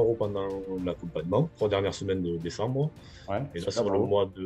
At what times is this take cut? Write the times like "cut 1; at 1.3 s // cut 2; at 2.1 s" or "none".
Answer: cut 1; at 1.5 s